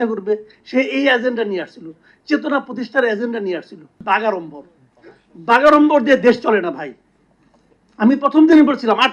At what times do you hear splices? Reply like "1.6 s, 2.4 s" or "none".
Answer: 4.0 s